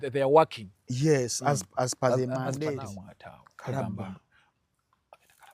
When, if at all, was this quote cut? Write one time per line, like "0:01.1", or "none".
0:02.8

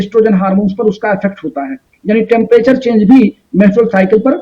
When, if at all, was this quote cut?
none

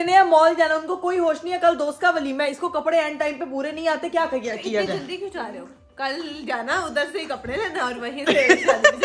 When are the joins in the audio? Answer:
none

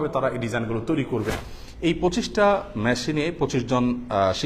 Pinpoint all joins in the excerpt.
0:01.3

